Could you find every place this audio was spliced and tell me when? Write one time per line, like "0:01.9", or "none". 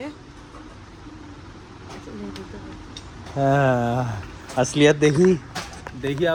none